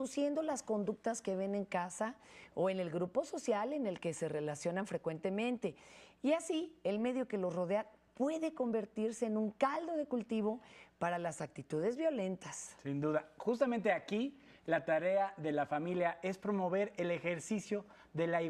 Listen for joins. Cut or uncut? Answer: uncut